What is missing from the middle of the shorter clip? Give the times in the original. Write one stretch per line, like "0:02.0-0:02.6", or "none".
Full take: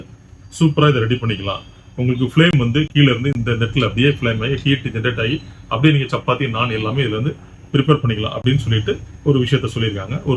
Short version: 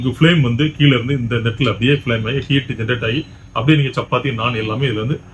none

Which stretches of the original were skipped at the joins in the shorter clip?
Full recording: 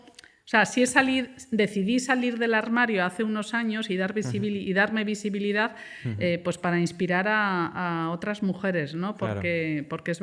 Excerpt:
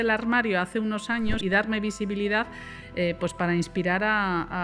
0:03.8-0:04.6

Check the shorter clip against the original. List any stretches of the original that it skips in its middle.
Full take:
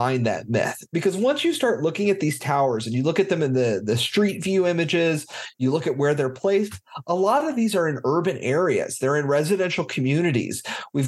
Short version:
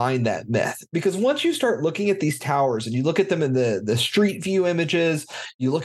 none

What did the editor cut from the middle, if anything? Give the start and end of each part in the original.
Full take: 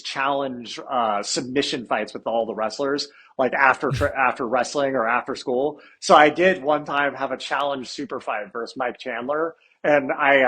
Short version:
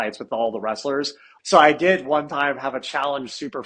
0:03.2-0:05.8

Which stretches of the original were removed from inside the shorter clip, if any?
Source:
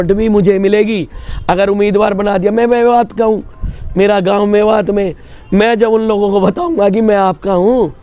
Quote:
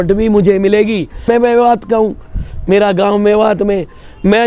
0:01.2-0:02.5

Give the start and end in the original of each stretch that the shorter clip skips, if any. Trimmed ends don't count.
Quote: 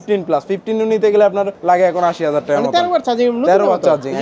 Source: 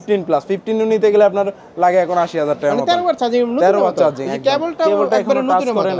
0:01.5-0:01.7

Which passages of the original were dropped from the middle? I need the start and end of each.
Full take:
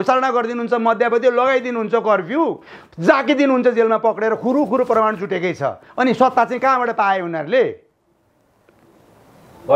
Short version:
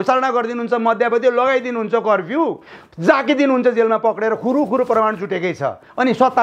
none

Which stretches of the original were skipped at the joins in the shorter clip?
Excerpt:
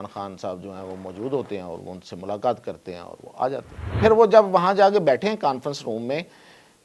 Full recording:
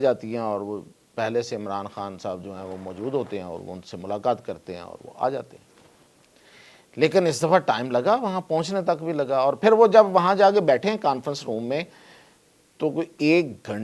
0:05.8-0:09.6

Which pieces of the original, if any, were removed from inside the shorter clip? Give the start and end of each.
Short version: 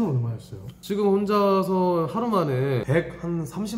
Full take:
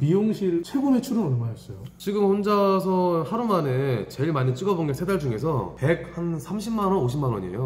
0:04.0-0:05.8

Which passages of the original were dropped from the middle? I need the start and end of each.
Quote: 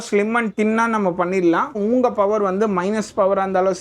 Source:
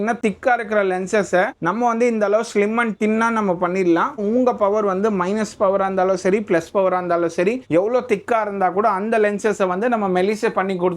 none

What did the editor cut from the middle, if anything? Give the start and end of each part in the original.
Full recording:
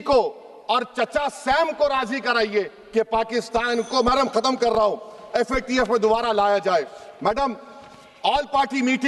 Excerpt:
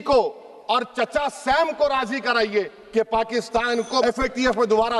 0:04.0-0:05.4

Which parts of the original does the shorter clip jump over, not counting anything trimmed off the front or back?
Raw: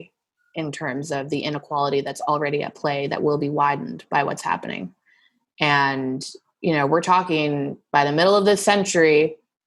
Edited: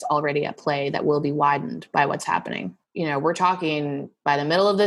0:04.9-0:06.4

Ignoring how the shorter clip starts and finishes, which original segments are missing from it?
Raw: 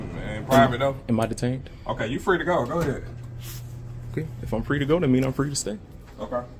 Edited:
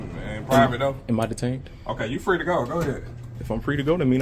0:03.3-0:04.3

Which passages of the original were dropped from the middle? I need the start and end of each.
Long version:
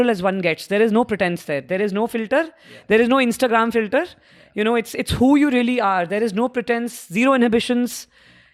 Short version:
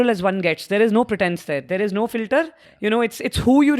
0:02.6-0:04.4

